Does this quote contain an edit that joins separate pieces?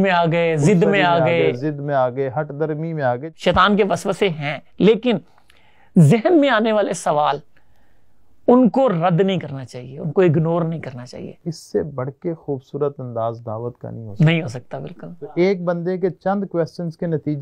yes; 3 cuts; at 3.2 s, 11.5 s, 15.4 s

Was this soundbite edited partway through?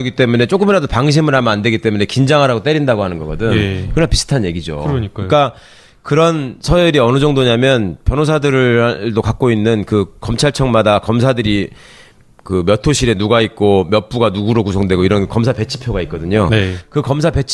yes; 1 cut; at 7.5 s

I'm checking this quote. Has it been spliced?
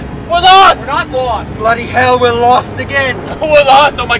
yes; 1 cut; at 1.0 s

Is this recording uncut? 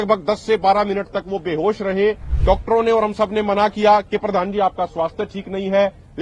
no; 1 cut; at 2.3 s

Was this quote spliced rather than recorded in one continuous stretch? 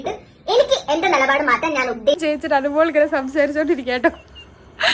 yes; 1 cut; at 2.2 s

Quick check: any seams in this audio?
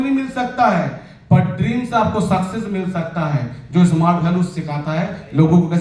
no; 0 cuts

